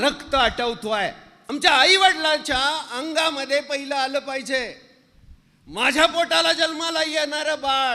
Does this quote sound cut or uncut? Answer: cut